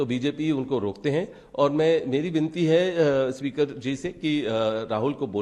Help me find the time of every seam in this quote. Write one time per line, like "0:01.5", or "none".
none